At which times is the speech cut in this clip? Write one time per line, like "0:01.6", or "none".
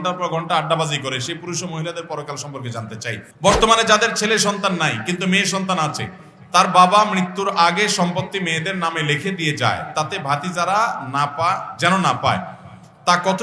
0:03.3